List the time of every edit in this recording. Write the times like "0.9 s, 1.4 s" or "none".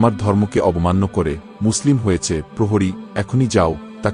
none